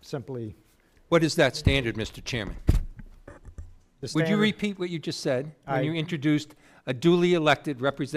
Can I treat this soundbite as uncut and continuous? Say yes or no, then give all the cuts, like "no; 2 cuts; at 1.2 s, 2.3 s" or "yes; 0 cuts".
no; 1 cut; at 2.2 s